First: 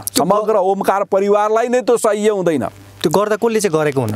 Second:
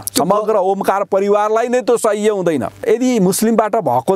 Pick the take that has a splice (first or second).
second